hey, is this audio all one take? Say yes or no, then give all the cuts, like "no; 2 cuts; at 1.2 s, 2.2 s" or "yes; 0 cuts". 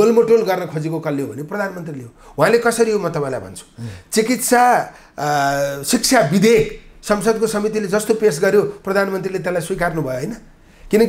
yes; 0 cuts